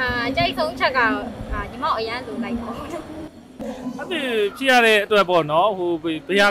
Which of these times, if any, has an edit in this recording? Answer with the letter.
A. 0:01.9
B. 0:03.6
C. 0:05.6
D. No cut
B